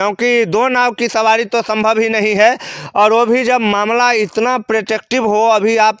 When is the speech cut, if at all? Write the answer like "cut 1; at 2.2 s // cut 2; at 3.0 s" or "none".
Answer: none